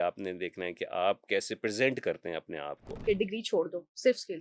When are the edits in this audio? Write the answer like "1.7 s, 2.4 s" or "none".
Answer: 2.8 s